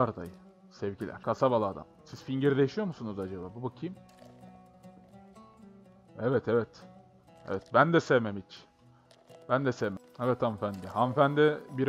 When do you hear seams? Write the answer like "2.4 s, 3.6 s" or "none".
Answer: 1.1 s, 10.1 s